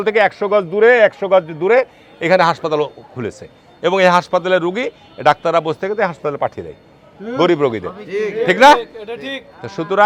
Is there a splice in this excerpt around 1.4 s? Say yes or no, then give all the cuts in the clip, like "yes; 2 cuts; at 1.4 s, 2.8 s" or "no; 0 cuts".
no; 0 cuts